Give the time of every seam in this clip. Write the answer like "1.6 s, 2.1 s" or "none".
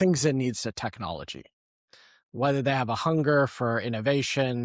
2.2 s